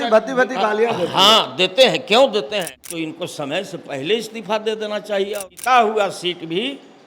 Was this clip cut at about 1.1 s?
no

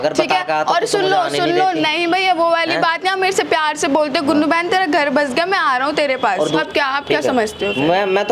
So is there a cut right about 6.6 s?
yes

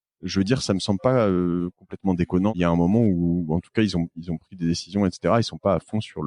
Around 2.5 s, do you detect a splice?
yes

